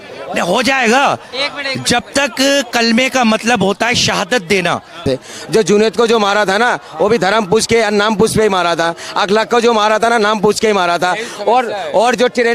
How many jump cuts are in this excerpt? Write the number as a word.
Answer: one